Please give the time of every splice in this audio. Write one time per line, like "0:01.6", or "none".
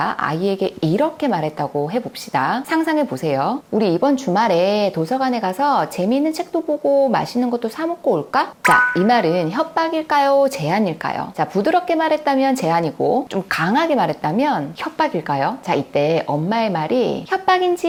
none